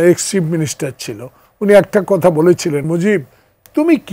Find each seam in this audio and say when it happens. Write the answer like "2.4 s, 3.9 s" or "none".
2.8 s